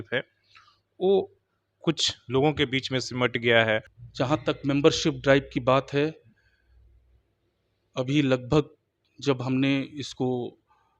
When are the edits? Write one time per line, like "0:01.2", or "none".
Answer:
0:04.0